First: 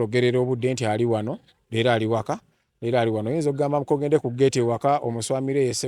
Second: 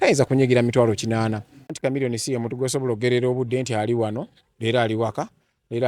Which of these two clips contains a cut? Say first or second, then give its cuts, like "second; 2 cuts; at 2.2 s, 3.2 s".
second; 1 cut; at 1.7 s